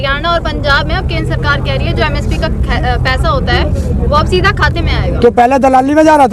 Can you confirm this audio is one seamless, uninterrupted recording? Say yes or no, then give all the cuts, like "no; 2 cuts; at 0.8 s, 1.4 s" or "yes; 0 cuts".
yes; 0 cuts